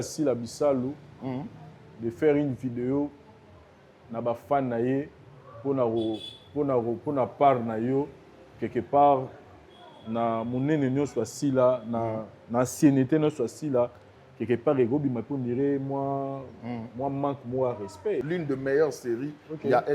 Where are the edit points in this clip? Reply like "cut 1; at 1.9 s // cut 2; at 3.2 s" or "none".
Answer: cut 1; at 18.2 s